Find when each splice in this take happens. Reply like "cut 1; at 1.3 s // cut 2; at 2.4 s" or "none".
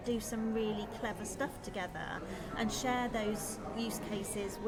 none